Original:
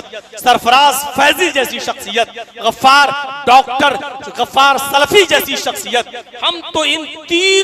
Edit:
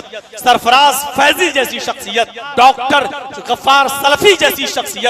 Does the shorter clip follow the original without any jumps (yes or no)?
no